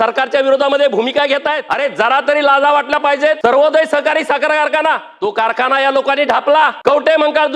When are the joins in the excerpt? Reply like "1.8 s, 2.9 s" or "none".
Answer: 1.6 s, 3.4 s, 5.1 s, 6.8 s